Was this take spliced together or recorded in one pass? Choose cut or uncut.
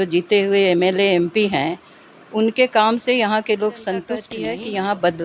cut